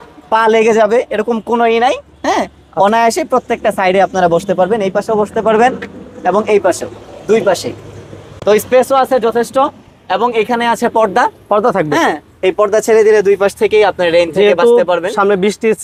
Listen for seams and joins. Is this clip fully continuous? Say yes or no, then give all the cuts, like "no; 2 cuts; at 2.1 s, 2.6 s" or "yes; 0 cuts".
yes; 0 cuts